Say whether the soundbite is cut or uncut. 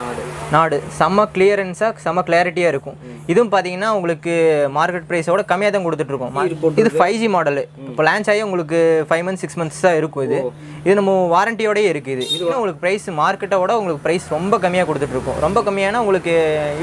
cut